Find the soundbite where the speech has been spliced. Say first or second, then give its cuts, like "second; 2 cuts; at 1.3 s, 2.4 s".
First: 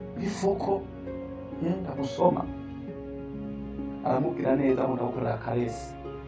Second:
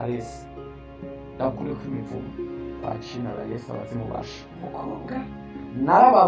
second; 1 cut; at 2.4 s